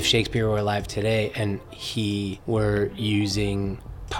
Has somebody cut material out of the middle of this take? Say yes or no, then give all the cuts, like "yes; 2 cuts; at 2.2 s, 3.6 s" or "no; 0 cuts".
yes; 1 cut; at 2.4 s